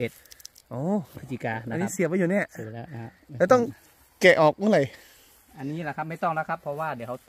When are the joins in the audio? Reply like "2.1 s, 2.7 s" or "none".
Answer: none